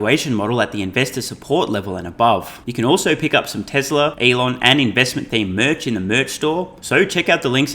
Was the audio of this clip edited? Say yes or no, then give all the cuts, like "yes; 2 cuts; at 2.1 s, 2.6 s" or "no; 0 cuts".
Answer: yes; 3 cuts; at 2.6 s, 4.2 s, 6.8 s